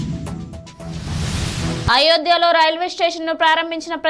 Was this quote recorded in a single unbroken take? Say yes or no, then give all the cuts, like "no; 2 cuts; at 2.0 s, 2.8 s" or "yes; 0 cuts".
yes; 0 cuts